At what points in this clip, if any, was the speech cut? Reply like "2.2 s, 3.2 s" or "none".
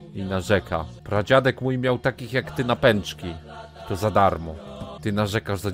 1.0 s, 4.8 s